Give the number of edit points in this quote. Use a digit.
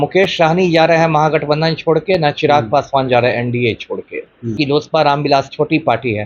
1